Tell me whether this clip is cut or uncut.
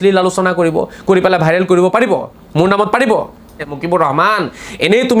cut